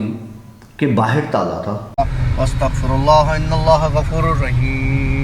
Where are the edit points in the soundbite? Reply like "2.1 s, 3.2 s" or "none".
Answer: 1.8 s